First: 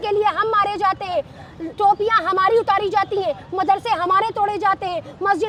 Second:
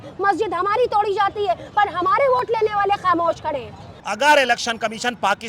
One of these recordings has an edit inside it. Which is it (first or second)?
second